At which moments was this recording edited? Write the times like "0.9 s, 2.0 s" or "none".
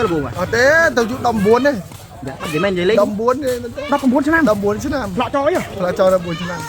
none